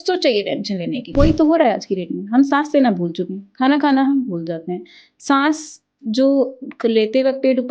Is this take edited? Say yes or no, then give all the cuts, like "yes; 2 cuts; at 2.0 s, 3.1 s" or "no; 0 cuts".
yes; 1 cut; at 1.2 s